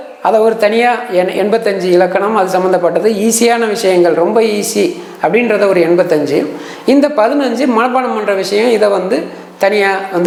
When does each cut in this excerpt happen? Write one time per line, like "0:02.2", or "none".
none